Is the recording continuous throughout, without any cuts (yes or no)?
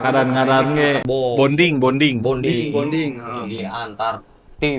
no